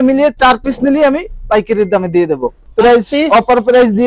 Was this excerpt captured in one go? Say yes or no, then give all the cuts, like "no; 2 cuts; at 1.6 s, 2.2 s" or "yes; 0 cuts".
no; 1 cut; at 2.6 s